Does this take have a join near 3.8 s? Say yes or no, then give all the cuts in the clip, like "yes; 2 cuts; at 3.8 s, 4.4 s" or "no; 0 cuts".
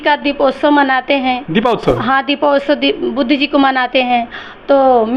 no; 0 cuts